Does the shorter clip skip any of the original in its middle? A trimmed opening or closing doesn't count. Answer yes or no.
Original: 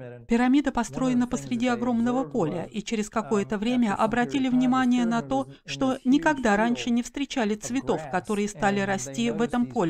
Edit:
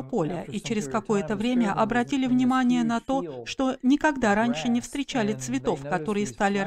no